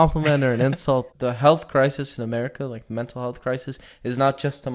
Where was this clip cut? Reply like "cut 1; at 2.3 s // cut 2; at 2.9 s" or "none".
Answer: cut 1; at 1.1 s